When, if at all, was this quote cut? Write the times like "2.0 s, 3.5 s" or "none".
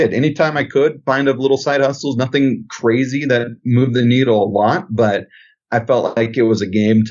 none